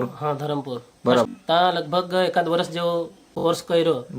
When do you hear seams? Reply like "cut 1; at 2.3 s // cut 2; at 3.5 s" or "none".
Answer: cut 1; at 1.3 s // cut 2; at 3.2 s